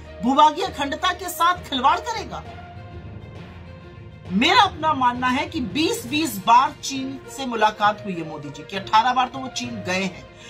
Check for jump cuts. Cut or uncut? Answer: cut